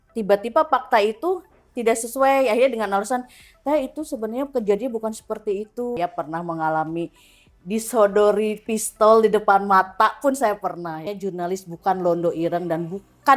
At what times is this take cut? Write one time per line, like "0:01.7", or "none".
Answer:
0:06.0
0:11.0